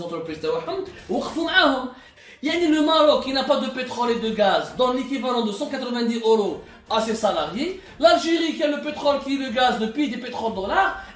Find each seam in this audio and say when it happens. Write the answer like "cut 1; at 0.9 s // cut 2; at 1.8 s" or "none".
cut 1; at 2.1 s